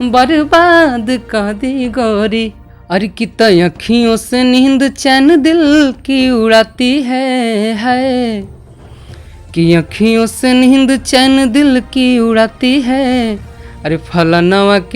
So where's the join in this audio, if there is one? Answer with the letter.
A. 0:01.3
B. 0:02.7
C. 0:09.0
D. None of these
B